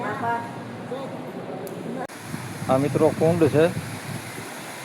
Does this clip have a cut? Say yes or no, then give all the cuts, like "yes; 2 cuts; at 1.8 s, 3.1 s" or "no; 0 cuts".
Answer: yes; 1 cut; at 2.1 s